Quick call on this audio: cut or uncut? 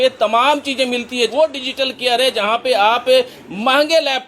cut